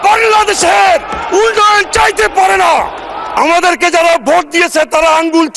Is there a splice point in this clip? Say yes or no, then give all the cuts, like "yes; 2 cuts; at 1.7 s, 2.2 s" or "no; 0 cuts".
yes; 1 cut; at 3.3 s